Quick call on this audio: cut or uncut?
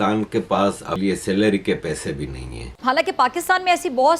cut